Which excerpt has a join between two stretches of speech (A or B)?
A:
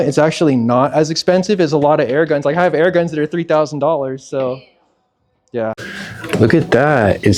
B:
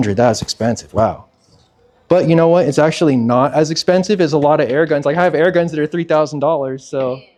A